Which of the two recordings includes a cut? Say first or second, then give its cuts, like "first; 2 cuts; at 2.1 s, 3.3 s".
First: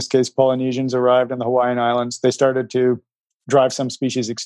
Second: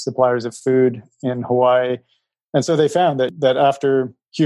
second; 1 cut; at 3.3 s